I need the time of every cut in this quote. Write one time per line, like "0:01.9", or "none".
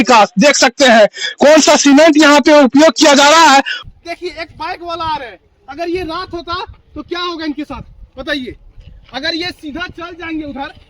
0:03.8

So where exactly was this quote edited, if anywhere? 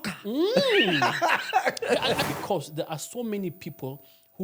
0:02.2

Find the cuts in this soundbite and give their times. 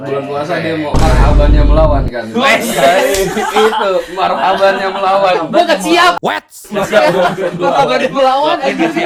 none

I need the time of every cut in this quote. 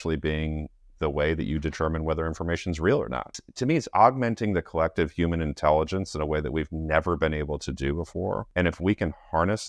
0:03.4
0:08.5

